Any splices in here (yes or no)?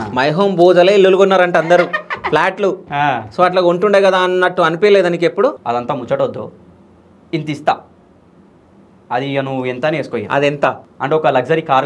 yes